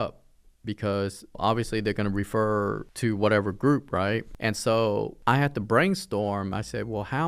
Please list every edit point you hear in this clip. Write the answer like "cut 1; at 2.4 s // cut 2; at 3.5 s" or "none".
cut 1; at 1.4 s // cut 2; at 2.9 s // cut 3; at 4.3 s // cut 4; at 5.1 s